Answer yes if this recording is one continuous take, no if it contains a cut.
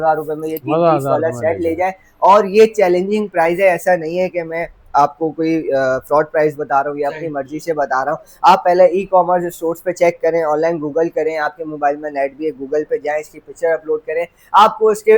yes